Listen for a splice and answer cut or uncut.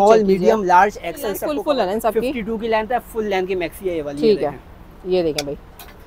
cut